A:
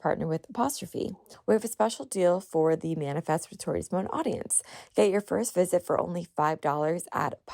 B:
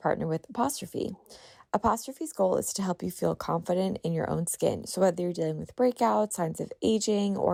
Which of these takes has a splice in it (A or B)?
A